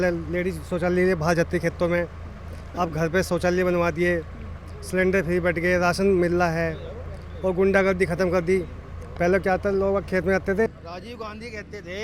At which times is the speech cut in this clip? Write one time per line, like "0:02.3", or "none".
0:10.7

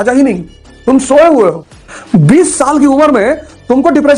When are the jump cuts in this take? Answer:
0:00.9
0:01.7

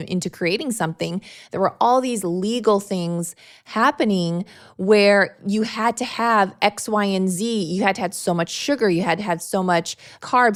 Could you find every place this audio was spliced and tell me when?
none

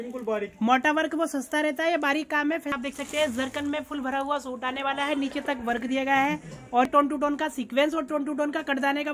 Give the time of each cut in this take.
0:02.7
0:06.9

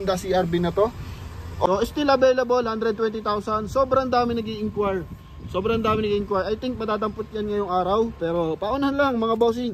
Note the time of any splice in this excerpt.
0:01.7

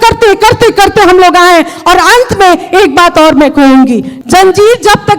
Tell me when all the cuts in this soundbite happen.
0:04.1

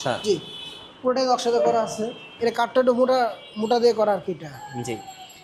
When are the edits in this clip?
0:02.2

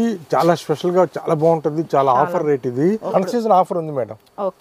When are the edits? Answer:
0:03.1

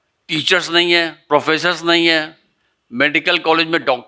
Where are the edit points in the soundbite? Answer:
0:01.2

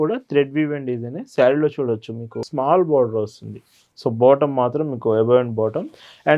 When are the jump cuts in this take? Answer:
0:02.5

